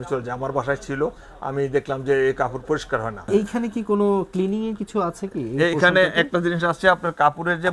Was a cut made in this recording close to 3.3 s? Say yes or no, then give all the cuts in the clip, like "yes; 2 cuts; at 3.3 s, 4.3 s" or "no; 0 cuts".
yes; 1 cut; at 3.3 s